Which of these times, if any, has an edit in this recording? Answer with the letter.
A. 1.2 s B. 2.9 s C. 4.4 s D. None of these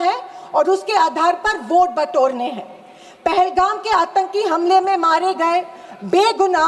D